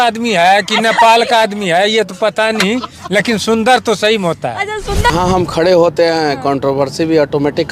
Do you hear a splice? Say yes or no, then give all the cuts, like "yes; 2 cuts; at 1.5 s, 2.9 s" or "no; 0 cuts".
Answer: yes; 1 cut; at 5.1 s